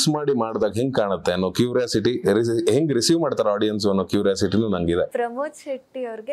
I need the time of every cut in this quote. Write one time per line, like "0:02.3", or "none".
0:05.1